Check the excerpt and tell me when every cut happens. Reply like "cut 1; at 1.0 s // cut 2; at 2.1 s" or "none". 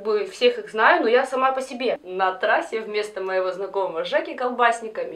cut 1; at 2.1 s